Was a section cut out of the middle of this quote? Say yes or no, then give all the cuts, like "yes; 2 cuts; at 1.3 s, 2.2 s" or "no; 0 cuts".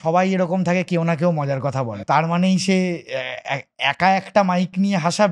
yes; 1 cut; at 1.8 s